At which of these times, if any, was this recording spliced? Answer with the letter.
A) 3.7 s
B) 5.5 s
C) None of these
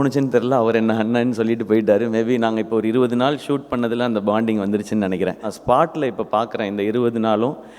B